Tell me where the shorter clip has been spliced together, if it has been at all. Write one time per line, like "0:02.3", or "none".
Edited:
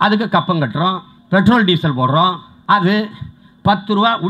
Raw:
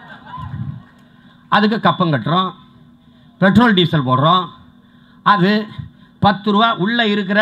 0:01.1
0:02.5